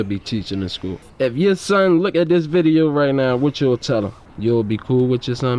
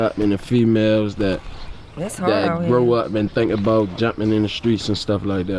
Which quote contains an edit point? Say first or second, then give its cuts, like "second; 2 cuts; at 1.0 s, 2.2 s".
first; 2 cuts; at 1.1 s, 4.2 s